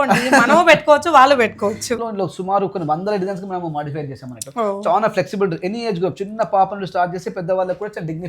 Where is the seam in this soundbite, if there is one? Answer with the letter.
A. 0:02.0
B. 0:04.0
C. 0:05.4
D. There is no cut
A